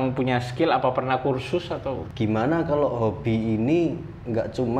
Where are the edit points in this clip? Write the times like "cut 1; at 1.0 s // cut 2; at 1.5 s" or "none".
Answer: cut 1; at 2.1 s